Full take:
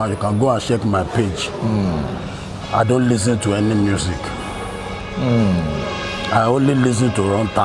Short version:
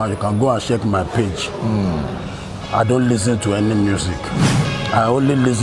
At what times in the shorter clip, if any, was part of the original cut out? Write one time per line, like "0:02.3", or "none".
0:04.7